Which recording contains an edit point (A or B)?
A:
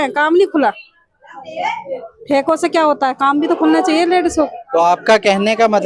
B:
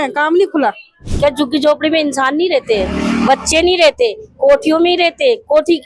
B